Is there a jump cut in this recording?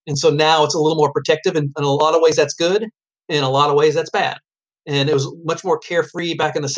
no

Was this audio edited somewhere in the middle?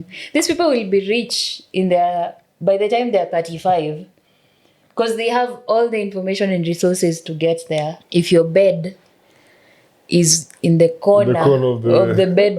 yes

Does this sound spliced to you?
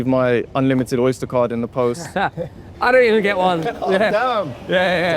no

